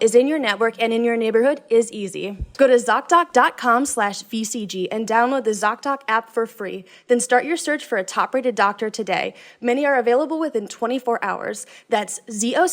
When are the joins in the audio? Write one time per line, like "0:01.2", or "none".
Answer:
0:02.4